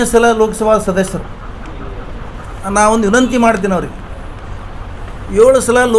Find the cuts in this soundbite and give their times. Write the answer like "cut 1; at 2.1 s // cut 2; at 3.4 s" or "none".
cut 1; at 2.5 s